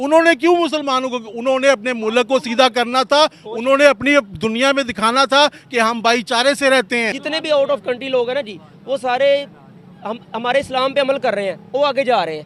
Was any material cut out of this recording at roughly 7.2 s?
yes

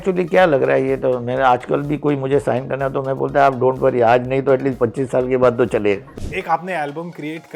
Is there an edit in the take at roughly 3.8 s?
no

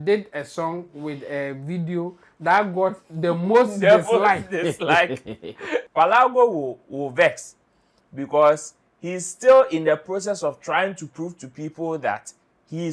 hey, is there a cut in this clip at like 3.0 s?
no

